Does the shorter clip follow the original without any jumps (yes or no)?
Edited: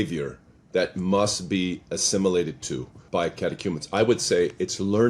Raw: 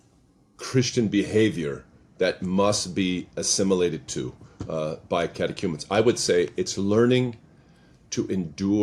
no